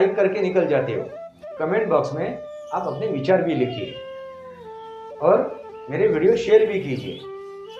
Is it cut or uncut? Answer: cut